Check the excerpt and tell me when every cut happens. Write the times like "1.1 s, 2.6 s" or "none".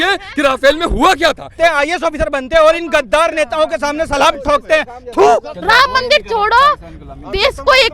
1.5 s, 5.5 s